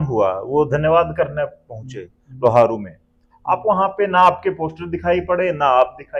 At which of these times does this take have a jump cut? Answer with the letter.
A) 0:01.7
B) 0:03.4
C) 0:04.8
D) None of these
D